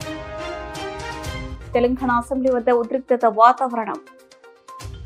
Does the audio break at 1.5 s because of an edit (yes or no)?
yes